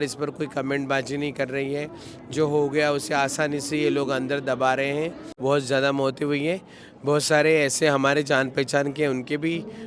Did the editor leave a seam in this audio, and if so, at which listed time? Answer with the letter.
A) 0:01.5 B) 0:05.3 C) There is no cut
B